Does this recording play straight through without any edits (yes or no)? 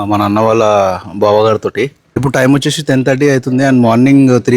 no